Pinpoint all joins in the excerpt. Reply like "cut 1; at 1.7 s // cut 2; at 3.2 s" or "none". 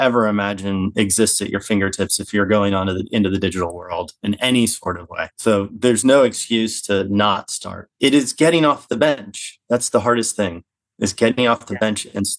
none

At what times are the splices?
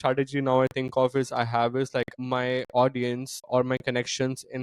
cut 1; at 2.1 s // cut 2; at 3.5 s

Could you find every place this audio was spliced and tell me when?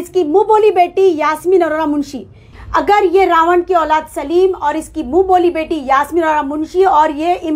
cut 1; at 2.5 s

